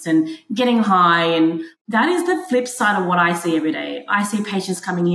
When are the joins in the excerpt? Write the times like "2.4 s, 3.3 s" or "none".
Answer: 1.7 s